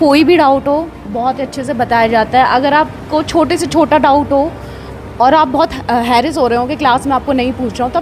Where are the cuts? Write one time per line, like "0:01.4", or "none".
none